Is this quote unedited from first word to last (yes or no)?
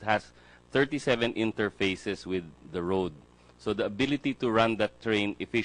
yes